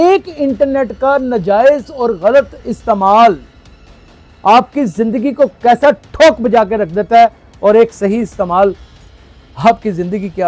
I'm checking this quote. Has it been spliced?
no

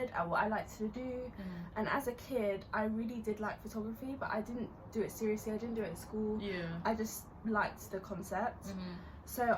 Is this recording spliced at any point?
no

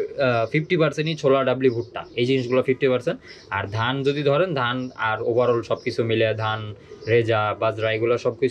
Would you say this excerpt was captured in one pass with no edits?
yes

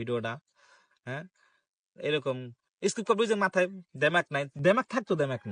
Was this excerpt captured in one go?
yes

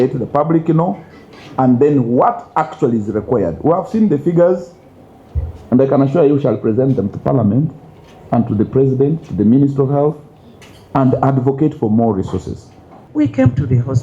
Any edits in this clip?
yes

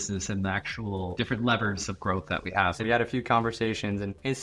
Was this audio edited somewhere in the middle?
yes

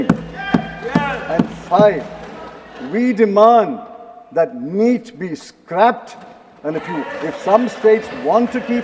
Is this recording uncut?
yes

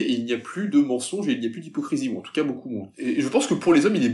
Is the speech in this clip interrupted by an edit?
yes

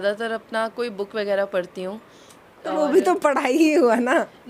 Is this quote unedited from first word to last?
yes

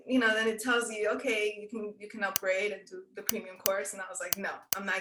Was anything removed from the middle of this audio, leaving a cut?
no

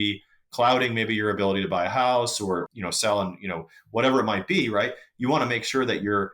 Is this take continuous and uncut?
no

